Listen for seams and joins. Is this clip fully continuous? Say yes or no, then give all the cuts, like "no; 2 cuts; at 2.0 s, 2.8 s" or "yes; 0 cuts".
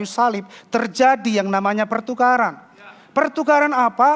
yes; 0 cuts